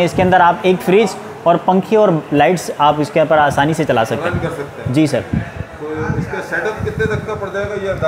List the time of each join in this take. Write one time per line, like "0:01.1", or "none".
none